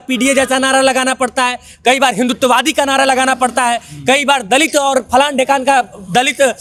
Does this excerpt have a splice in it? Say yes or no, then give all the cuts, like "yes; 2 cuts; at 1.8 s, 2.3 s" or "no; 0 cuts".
no; 0 cuts